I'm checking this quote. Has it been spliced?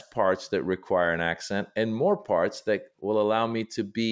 no; 0 cuts

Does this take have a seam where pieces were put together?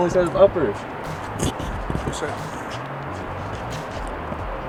no; 0 cuts

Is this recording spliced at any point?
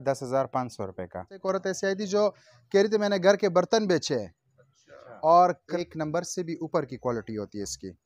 yes; 2 cuts; at 1.4 s, 5.6 s

